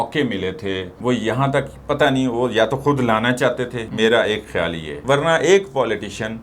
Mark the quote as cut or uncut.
cut